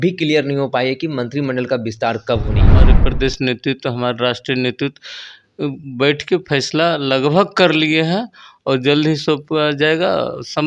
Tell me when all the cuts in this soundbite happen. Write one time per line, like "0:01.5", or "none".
0:02.9